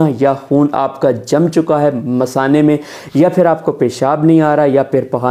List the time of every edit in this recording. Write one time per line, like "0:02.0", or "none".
none